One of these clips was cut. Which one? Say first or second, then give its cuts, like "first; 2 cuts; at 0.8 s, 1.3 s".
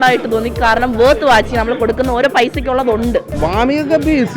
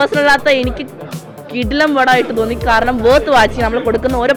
first; 1 cut; at 3.3 s